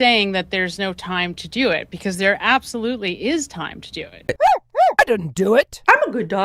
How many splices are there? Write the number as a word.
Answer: one